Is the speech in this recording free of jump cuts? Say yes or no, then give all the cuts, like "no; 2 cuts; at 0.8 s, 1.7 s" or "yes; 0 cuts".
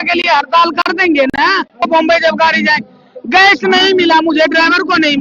no; 1 cut; at 1.8 s